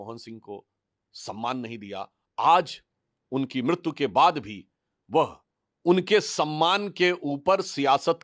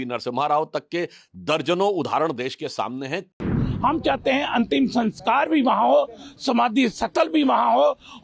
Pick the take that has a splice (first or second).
second